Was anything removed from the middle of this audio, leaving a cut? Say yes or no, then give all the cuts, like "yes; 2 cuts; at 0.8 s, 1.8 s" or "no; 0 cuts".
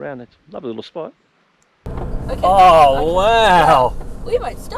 yes; 1 cut; at 1.9 s